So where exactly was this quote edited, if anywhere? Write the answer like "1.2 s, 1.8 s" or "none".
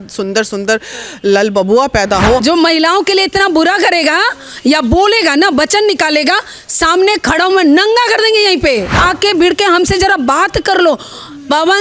2.4 s, 8.9 s